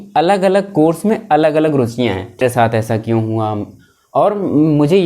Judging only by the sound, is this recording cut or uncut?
cut